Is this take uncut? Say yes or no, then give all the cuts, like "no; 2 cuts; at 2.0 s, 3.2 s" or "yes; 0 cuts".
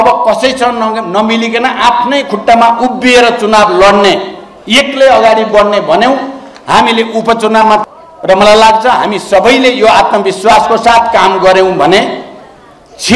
no; 1 cut; at 7.8 s